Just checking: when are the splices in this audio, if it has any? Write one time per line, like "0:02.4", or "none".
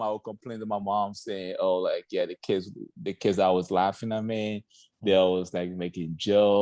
none

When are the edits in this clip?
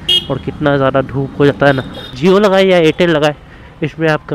0:02.1

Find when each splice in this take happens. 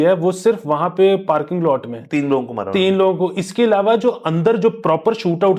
none

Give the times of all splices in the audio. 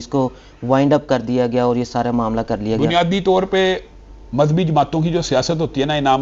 none

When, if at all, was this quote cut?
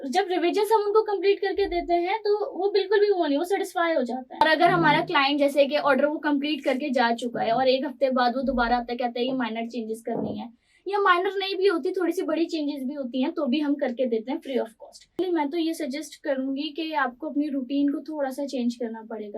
0:04.4
0:15.2

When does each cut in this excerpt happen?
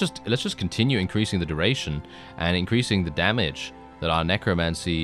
none

